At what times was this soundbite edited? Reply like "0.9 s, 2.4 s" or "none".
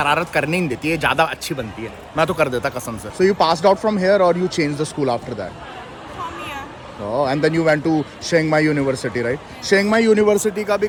none